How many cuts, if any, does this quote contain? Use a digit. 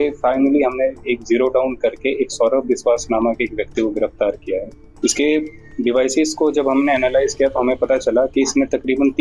1